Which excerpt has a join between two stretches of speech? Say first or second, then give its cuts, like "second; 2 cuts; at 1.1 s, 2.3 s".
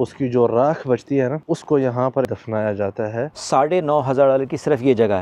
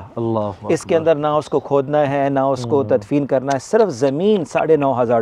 first; 3 cuts; at 1.4 s, 2.2 s, 3.4 s